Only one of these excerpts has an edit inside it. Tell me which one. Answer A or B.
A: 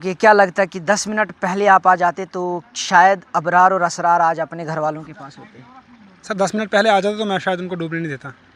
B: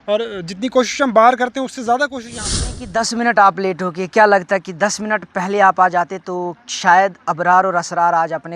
B